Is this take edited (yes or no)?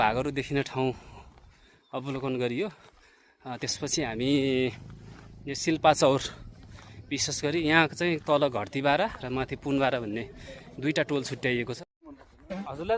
yes